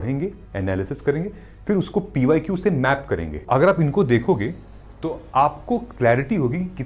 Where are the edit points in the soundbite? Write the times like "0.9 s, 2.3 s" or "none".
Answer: 3.4 s